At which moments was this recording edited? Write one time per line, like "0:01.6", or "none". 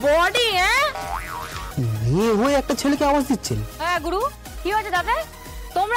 0:01.7